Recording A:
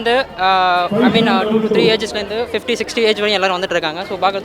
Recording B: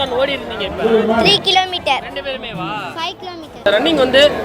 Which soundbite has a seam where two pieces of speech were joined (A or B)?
B